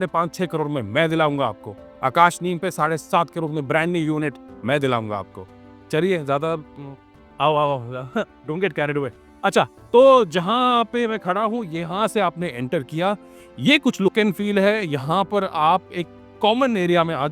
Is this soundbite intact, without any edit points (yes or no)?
yes